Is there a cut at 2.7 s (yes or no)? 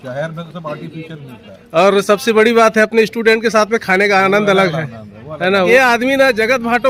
no